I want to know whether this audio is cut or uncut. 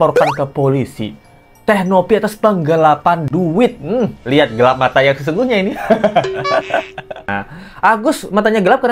uncut